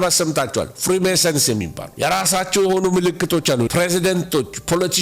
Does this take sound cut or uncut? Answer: cut